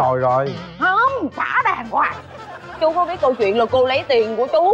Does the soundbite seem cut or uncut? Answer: cut